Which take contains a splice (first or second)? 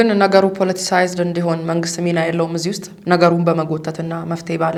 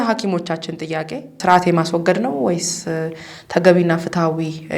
second